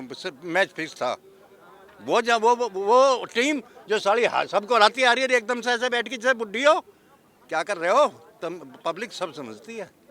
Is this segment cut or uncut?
uncut